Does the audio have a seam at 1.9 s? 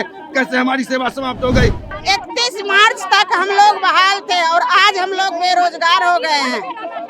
yes; 1 cut; at 1.9 s

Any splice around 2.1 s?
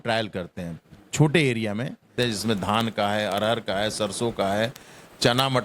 yes; 1 cut; at 2.1 s

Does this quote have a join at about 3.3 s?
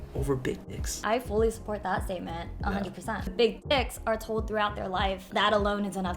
yes; 3 cuts; at 1.0 s, 3.3 s, 5.2 s

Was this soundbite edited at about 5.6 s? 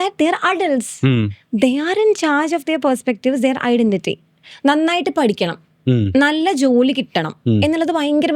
no; 1 cut; at 4.4 s

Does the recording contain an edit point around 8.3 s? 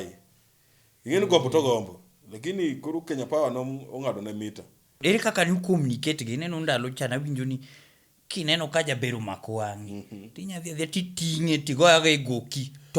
no; 1 cut; at 5.0 s

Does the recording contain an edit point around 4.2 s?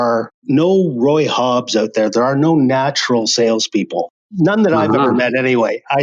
no; 0 cuts

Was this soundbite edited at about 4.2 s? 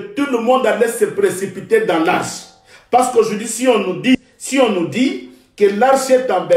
yes; 1 cut; at 4.2 s

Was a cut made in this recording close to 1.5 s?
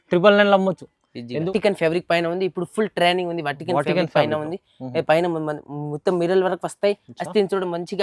yes; 1 cut; at 1.5 s

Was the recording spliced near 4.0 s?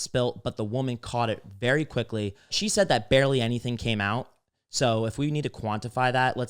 no; 1 cut; at 2.6 s

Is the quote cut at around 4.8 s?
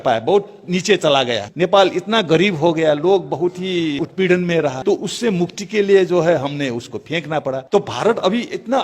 yes; 4 cuts; at 1.4 s, 4.0 s, 4.8 s, 7.6 s

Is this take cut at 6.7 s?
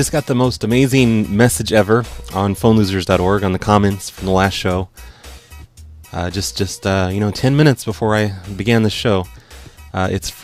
yes; 1 cut; at 6.7 s

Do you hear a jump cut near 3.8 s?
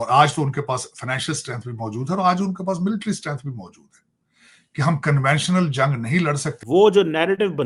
no; 1 cut; at 6.5 s

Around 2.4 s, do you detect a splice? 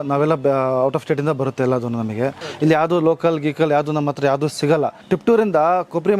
yes; 2 cuts; at 2.4 s, 5.0 s

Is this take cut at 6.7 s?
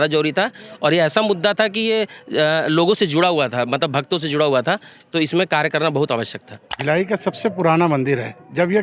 yes; 1 cut; at 6.7 s

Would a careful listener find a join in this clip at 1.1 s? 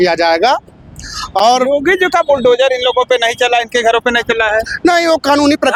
no; 0 cuts

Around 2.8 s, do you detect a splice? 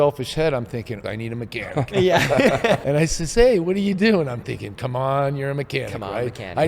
yes; 2 cuts; at 1.0 s, 2.8 s

